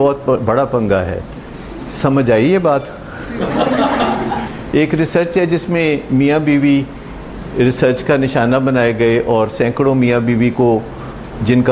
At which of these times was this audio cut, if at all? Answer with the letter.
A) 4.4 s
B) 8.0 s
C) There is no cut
A